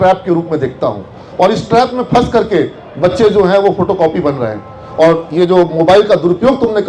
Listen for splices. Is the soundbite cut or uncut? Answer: uncut